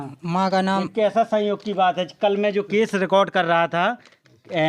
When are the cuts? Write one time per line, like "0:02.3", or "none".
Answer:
none